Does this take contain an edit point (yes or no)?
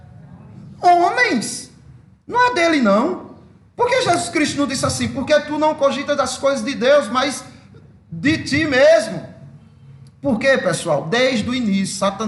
no